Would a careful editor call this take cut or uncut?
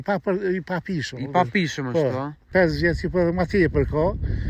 cut